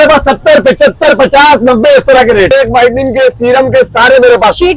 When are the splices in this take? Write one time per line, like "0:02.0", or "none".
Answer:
0:02.5